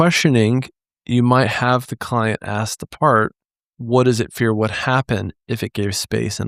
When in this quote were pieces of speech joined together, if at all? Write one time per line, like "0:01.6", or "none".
none